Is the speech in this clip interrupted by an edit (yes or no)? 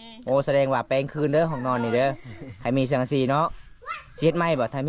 no